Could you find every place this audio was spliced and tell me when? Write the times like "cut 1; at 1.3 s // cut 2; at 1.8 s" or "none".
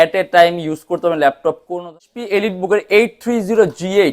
cut 1; at 2.1 s